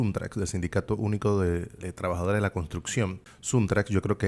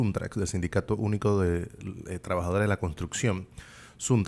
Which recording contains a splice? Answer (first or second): first